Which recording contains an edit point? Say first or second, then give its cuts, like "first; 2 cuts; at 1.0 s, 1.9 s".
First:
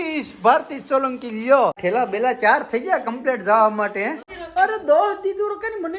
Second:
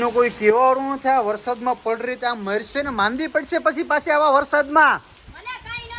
first; 2 cuts; at 1.8 s, 4.3 s